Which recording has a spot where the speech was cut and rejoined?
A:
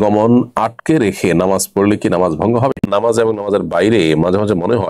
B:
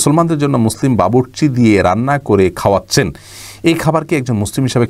A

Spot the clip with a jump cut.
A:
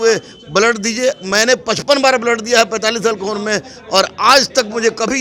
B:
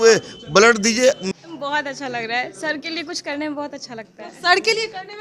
B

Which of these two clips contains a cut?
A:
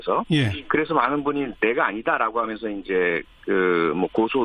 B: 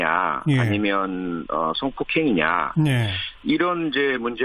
B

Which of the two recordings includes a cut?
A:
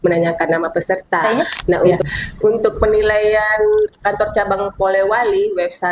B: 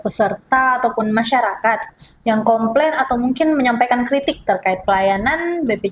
A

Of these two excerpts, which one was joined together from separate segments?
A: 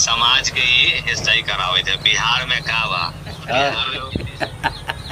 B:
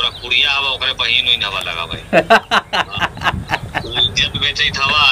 A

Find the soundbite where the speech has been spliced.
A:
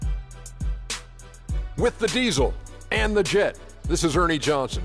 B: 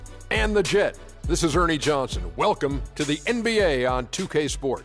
A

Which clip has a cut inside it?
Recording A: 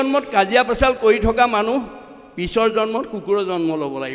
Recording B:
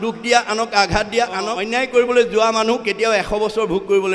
B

